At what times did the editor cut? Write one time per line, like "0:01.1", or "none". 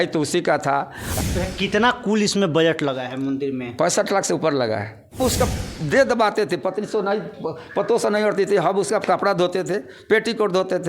0:01.2
0:05.2